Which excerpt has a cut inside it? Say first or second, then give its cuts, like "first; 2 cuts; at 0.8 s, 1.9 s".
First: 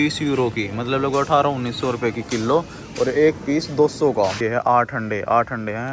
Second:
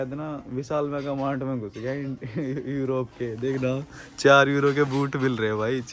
first; 1 cut; at 4.4 s